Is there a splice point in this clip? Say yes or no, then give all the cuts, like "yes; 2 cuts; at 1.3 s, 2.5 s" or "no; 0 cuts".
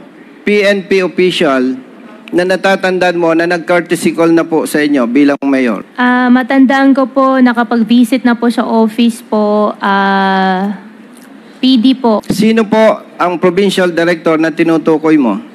yes; 2 cuts; at 5.9 s, 12.3 s